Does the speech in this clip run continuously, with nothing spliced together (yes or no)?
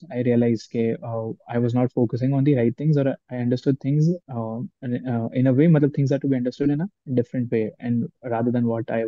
yes